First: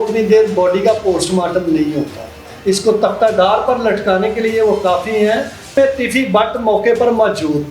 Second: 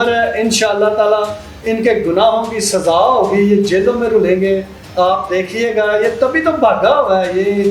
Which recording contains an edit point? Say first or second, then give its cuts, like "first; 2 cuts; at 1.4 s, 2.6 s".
first; 2 cuts; at 2.5 s, 5.8 s